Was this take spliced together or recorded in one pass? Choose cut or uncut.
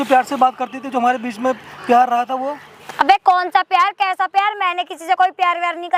uncut